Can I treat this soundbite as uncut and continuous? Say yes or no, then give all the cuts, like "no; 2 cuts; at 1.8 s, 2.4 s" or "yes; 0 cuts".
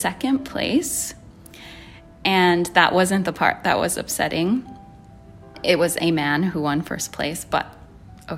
yes; 0 cuts